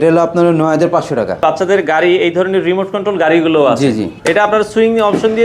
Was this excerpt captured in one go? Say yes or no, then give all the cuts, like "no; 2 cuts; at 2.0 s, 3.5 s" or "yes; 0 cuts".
no; 2 cuts; at 1.4 s, 4.1 s